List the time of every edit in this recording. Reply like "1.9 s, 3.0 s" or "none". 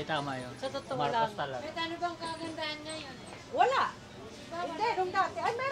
none

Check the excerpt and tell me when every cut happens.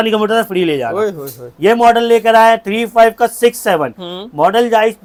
none

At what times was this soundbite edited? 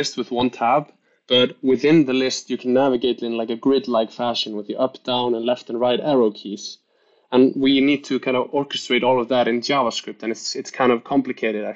none

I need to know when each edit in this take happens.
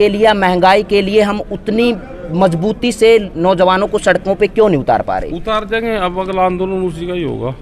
none

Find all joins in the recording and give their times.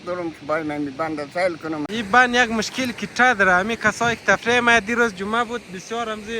1.8 s

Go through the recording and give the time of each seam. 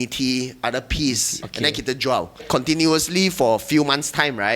1.4 s, 2.4 s

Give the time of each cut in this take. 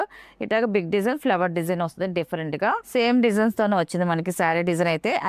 2.8 s

